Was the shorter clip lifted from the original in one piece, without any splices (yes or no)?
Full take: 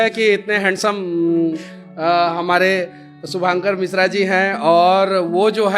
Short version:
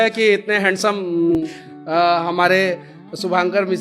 no